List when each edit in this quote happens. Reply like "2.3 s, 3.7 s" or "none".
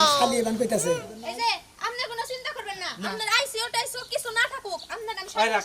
1.1 s